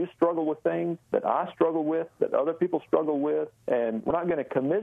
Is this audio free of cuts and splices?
no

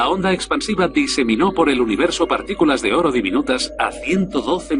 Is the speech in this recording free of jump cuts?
no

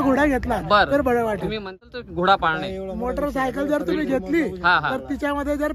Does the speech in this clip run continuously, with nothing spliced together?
no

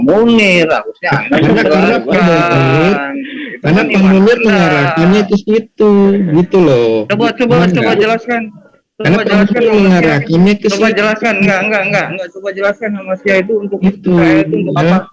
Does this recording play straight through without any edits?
yes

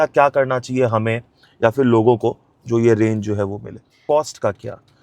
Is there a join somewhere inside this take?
yes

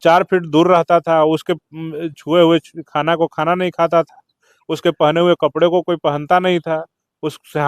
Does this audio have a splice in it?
no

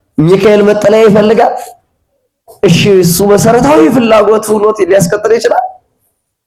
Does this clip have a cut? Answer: no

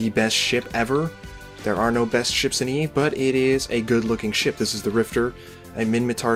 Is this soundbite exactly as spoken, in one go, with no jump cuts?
yes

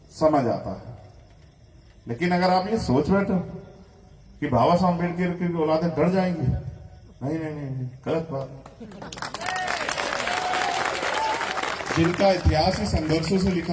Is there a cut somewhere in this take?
no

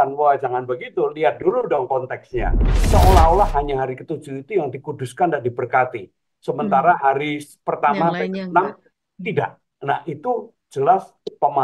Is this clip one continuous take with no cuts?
no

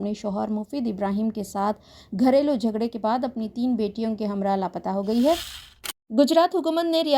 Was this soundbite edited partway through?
yes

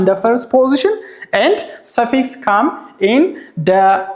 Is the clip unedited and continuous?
yes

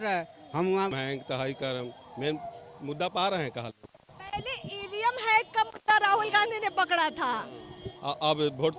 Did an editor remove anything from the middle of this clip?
yes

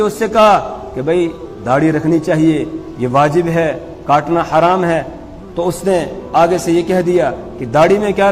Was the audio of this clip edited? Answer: no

